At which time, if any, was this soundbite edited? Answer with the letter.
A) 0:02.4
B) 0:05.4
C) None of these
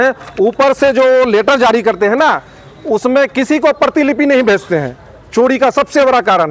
C